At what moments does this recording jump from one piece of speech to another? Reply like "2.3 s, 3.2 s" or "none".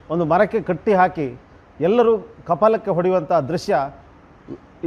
none